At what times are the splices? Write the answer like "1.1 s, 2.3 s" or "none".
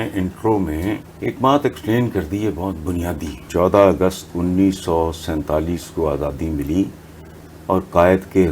1.1 s, 3.5 s